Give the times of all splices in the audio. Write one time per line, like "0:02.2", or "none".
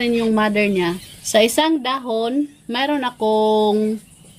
0:01.1